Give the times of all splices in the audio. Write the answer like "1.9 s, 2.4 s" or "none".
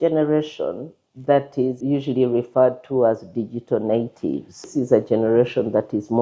1.8 s, 4.7 s